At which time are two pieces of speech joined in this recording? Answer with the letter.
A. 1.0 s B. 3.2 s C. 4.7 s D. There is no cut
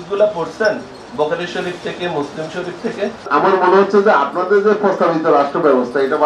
B